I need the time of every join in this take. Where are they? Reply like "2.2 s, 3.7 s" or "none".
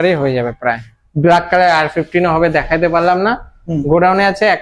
none